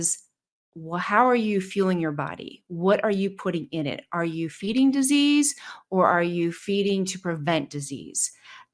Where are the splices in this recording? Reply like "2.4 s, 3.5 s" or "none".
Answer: none

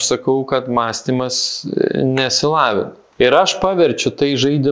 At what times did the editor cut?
3.0 s

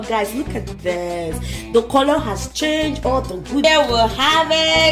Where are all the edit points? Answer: 3.6 s

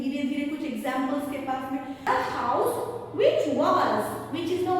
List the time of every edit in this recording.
2.0 s

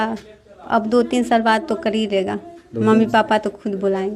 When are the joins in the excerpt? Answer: none

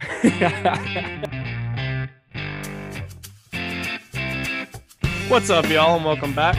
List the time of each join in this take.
1.1 s

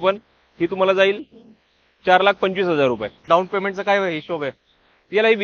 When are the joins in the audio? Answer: 3.3 s

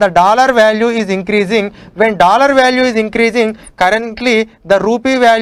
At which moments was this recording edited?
none

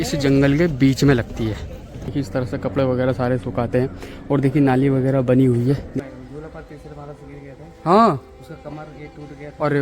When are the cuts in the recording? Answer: 2.1 s, 5.9 s

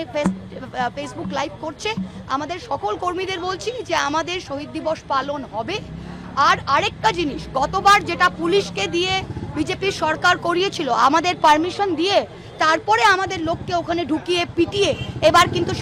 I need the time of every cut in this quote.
none

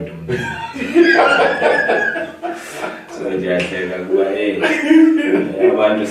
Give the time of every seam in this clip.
none

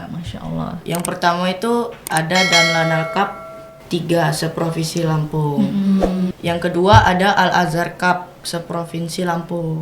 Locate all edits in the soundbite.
6.3 s

